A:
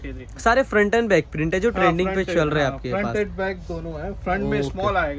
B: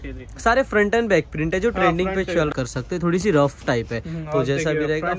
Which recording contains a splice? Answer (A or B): B